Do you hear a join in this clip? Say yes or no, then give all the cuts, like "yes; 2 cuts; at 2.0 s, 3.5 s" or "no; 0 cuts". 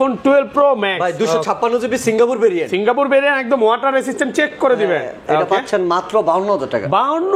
no; 0 cuts